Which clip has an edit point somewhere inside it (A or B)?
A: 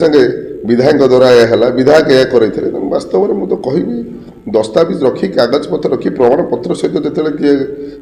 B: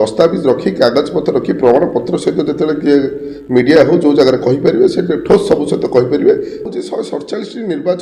B